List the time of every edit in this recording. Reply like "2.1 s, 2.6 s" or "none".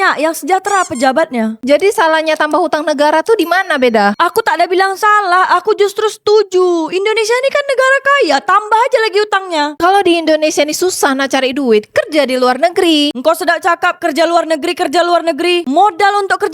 1.6 s, 9.8 s